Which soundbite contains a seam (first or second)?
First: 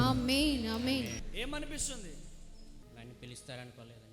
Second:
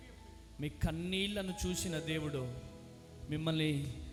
first